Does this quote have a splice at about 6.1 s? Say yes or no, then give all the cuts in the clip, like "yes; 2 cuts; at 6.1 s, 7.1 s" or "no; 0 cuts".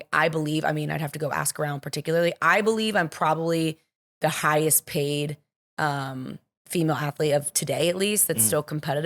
no; 0 cuts